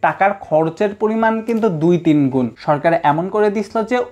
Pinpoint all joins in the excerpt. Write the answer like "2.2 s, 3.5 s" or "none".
2.6 s